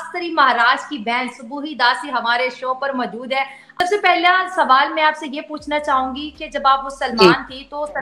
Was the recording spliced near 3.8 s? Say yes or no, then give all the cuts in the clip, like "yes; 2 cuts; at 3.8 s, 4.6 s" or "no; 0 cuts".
yes; 1 cut; at 3.8 s